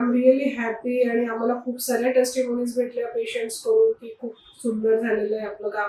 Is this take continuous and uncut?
yes; 0 cuts

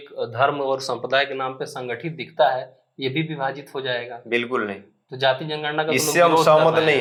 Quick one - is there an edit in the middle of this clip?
no; 0 cuts

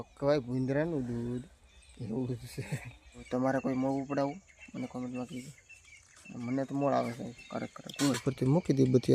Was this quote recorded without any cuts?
no; 2 cuts; at 3.2 s, 8.2 s

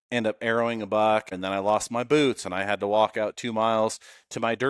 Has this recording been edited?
yes; 1 cut; at 1.4 s

